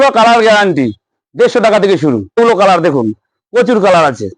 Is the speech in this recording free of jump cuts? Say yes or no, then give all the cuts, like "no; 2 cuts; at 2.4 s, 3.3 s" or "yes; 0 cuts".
no; 1 cut; at 2.4 s